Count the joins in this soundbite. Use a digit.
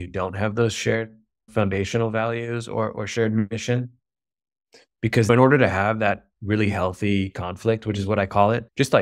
1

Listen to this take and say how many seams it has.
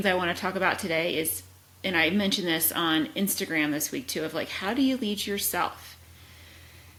0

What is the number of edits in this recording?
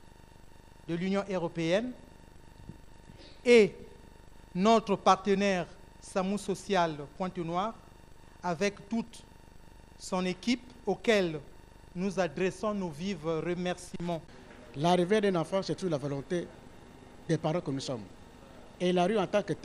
1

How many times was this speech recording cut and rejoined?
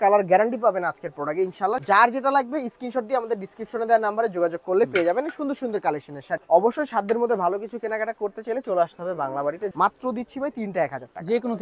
3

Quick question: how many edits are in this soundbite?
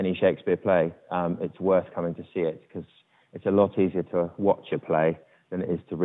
0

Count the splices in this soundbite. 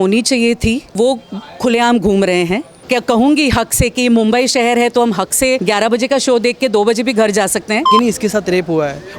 2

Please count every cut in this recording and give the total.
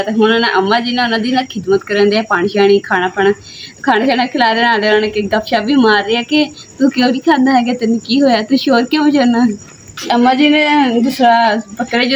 0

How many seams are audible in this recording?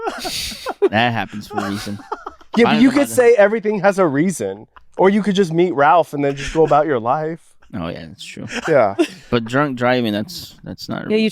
0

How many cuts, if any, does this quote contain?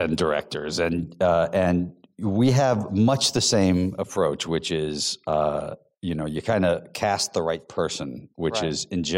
0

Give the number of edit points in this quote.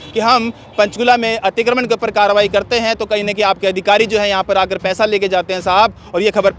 0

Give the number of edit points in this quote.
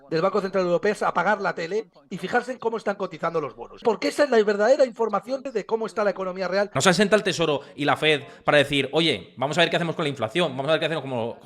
3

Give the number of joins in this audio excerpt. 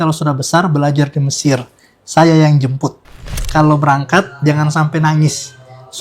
1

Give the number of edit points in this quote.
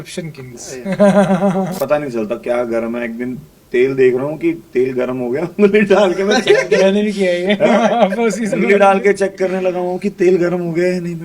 1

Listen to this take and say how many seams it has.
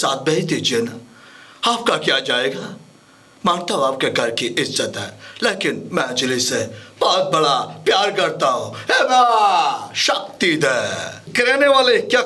1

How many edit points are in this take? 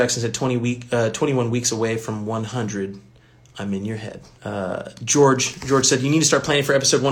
1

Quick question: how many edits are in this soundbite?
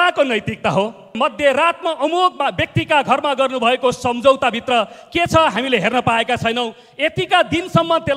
1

